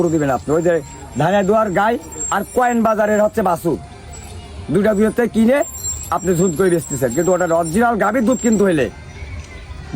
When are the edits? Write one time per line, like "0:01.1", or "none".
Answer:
none

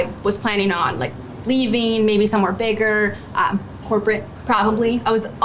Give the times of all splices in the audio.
none

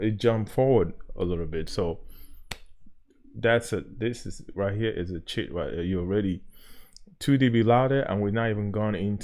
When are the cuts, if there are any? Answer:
none

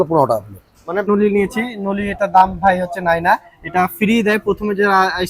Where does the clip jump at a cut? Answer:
0:01.1

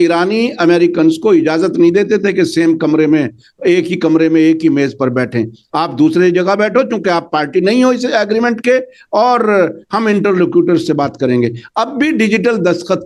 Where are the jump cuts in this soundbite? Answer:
none

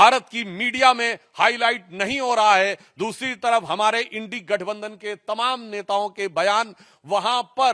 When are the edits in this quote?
none

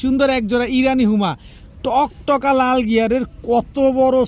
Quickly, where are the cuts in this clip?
none

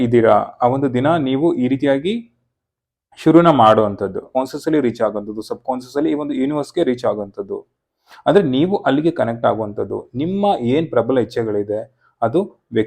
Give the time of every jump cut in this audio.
0:04.2

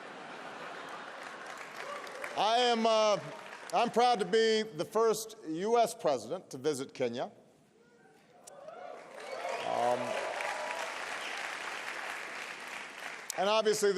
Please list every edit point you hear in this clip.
0:13.0

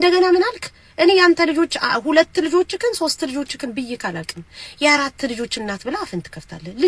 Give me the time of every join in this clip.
none

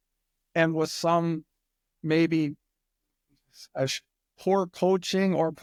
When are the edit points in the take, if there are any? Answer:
none

